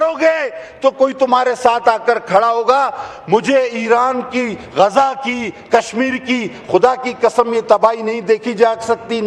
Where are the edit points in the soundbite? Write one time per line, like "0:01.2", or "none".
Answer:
none